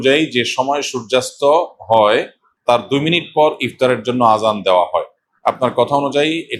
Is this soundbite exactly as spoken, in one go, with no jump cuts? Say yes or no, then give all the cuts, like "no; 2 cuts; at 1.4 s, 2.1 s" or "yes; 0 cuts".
yes; 0 cuts